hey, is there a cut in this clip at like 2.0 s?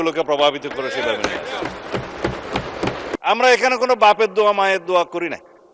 no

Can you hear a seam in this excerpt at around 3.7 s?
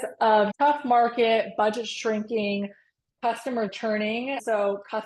yes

